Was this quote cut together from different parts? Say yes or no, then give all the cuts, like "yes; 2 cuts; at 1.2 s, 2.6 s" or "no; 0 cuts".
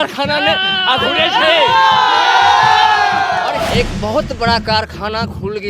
yes; 1 cut; at 3.6 s